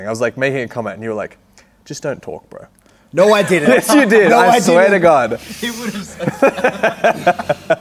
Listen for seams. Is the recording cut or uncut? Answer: uncut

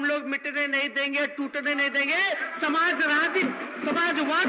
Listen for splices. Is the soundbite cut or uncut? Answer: uncut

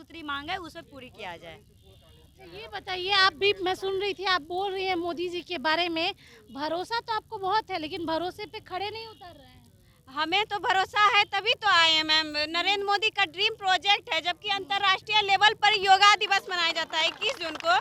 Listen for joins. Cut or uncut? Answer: uncut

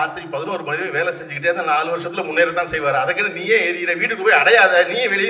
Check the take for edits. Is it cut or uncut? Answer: uncut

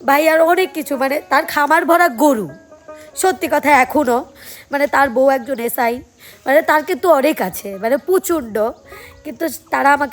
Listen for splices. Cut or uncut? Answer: uncut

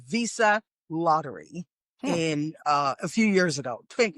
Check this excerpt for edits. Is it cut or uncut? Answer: uncut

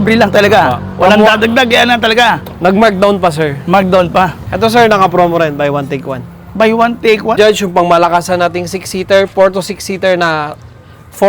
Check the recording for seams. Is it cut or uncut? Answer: cut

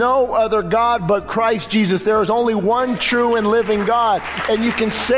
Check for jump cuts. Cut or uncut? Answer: uncut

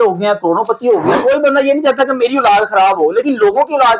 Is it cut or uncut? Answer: cut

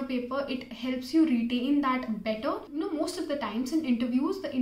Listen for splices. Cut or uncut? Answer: cut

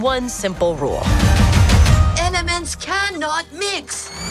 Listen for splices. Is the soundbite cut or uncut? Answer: uncut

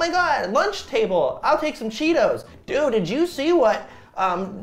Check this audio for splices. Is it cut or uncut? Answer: uncut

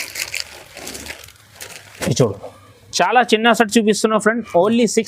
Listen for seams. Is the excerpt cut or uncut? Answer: cut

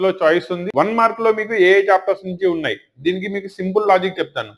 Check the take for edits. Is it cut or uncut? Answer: uncut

